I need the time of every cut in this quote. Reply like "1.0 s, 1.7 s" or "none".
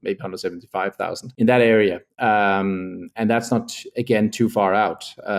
1.2 s